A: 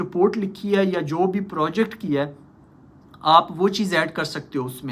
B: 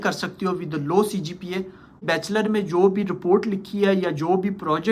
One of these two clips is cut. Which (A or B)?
B